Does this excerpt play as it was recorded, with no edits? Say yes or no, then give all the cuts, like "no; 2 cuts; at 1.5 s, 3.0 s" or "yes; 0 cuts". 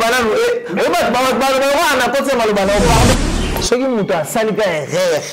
no; 1 cut; at 3.1 s